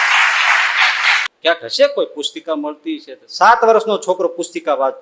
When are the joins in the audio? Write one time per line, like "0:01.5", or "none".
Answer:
0:01.3